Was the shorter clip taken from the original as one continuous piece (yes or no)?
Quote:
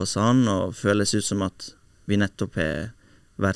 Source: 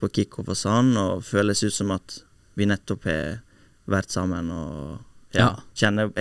yes